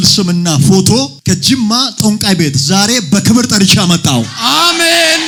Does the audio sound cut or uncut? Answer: uncut